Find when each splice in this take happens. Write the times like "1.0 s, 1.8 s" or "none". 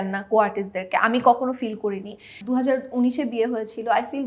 2.4 s